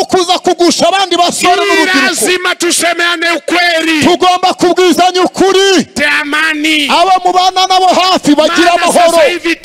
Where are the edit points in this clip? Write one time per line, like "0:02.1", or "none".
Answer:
0:05.9